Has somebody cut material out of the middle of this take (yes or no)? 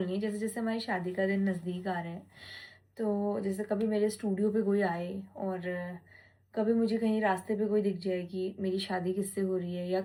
no